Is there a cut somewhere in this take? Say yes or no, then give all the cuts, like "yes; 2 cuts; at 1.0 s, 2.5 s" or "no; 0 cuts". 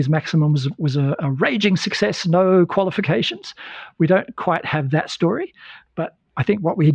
no; 0 cuts